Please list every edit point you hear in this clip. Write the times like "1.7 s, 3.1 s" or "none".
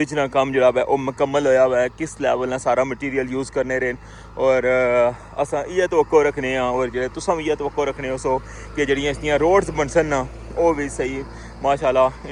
none